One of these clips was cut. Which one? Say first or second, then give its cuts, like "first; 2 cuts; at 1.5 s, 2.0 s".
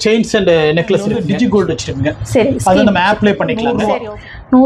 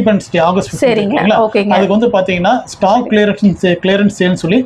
first; 2 cuts; at 1.2 s, 3.7 s